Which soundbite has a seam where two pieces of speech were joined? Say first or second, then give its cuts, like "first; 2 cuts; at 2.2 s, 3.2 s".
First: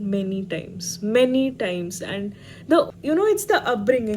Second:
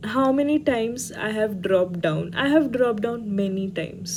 first; 1 cut; at 2.9 s